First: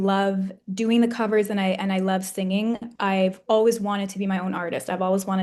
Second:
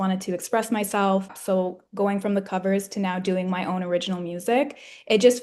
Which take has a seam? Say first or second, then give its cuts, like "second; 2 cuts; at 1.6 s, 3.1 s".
second; 1 cut; at 1.3 s